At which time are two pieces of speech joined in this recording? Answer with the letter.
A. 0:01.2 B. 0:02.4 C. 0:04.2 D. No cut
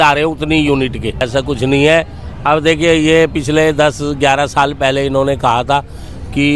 A